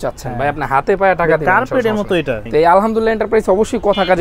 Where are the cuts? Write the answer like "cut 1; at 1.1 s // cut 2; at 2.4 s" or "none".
cut 1; at 2.4 s